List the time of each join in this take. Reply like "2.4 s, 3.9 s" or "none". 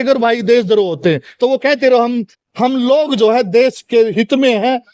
none

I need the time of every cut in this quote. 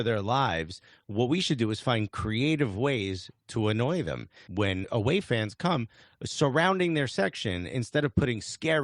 4.4 s

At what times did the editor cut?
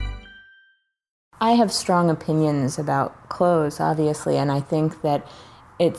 1.1 s

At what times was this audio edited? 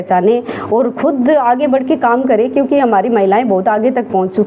none

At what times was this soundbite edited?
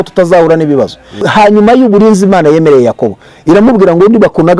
1.2 s

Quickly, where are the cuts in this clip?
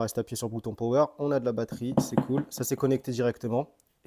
none

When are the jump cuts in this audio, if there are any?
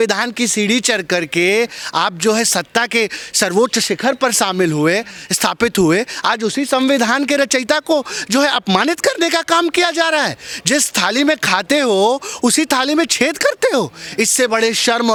none

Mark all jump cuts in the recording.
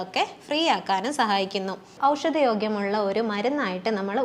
1.9 s

